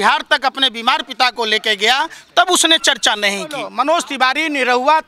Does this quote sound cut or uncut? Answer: cut